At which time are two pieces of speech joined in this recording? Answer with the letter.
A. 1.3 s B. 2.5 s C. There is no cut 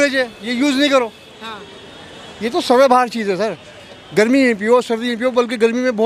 C